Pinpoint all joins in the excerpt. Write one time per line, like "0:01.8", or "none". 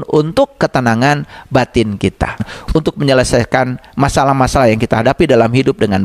0:02.5